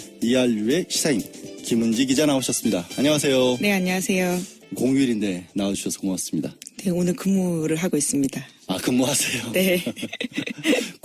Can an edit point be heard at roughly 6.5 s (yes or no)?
no